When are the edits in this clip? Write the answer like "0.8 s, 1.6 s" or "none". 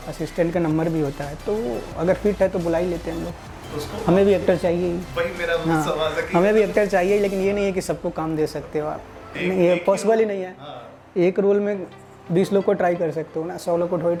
none